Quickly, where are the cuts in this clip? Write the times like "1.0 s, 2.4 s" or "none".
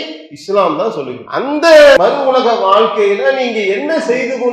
1.2 s, 2.0 s